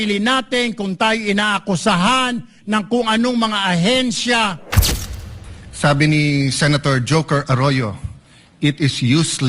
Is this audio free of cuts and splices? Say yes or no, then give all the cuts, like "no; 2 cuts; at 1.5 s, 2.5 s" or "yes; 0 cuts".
no; 1 cut; at 5.1 s